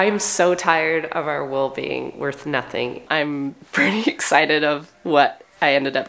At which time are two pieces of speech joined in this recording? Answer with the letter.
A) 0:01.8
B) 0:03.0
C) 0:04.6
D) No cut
B